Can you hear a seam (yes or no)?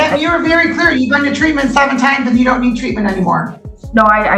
no